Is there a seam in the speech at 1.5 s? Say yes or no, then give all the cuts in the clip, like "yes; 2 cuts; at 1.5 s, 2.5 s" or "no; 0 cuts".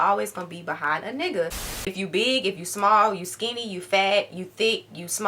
yes; 1 cut; at 1.5 s